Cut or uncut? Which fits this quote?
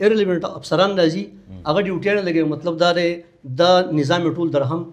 uncut